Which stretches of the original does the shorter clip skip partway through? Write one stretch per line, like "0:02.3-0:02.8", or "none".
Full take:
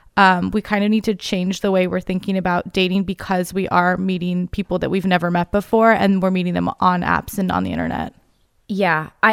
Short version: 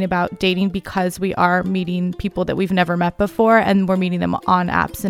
none